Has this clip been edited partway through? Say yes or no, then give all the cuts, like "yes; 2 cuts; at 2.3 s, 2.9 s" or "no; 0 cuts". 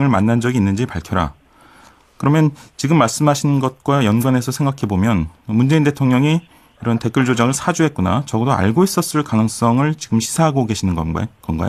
no; 0 cuts